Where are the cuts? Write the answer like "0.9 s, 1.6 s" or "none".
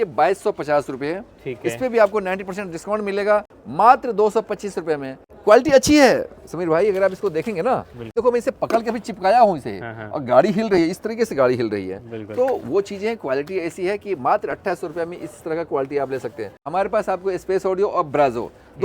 5.3 s, 8.0 s, 16.6 s